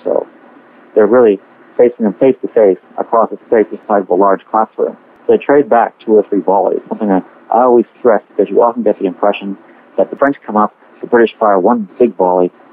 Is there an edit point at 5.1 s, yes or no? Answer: yes